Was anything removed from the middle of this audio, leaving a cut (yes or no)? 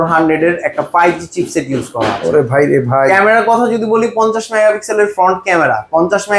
no